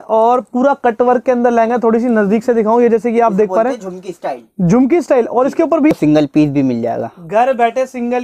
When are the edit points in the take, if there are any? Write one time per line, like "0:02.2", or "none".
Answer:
0:05.9